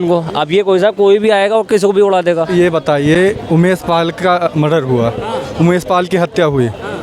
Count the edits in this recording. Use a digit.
1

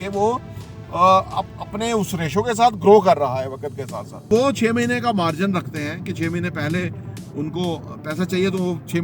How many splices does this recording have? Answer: 1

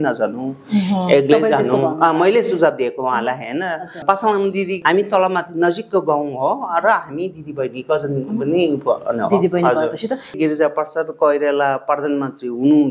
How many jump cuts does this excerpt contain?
2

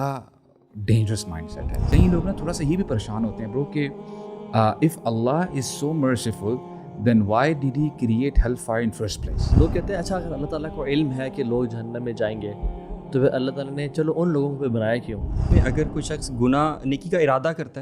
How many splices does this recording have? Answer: 3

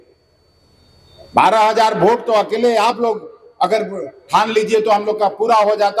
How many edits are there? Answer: 0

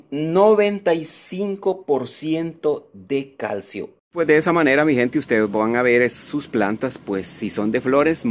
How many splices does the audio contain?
1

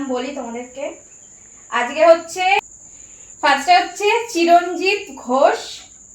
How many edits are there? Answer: 1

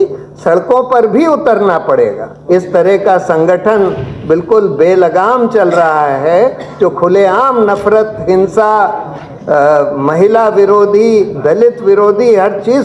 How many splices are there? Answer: 1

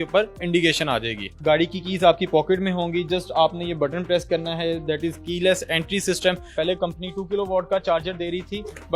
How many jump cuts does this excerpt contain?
2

